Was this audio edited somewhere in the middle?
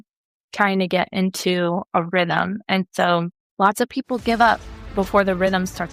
yes; 1 cut; at 4.7 s

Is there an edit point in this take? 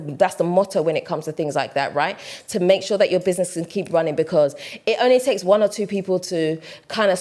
no; 0 cuts

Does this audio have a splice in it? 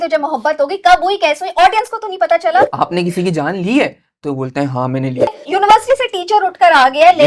yes; 2 cuts; at 2.7 s, 5.3 s

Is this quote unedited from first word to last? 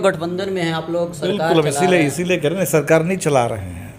yes; 0 cuts

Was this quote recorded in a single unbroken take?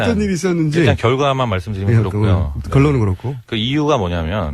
no; 1 cut; at 2.9 s

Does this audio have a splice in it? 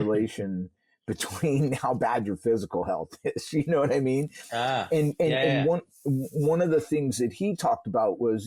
no; 0 cuts

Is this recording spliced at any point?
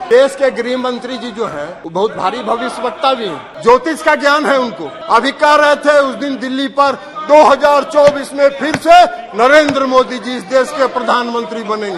yes; 3 cuts; at 1.8 s, 3.5 s, 4.9 s

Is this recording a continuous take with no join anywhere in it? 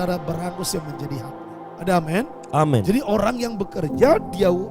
no; 1 cut; at 1.4 s

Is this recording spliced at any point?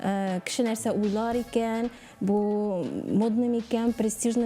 no; 0 cuts

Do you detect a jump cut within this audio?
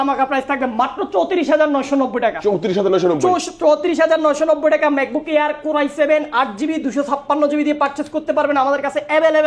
no; 0 cuts

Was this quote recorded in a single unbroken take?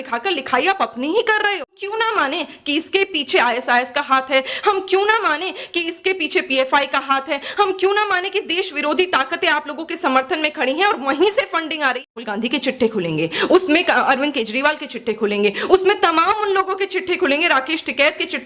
no; 2 cuts; at 1.9 s, 12.1 s

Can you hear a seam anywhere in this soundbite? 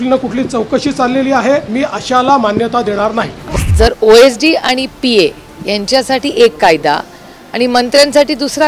yes; 2 cuts; at 1.7 s, 3.6 s

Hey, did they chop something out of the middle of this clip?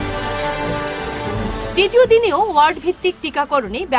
yes; 1 cut; at 1.2 s

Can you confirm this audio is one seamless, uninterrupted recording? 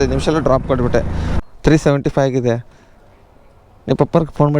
no; 1 cut; at 1.3 s

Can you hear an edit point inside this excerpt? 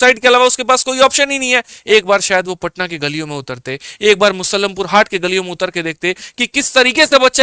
yes; 1 cut; at 1.7 s

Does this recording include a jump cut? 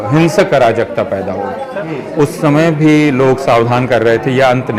yes; 1 cut; at 1.8 s

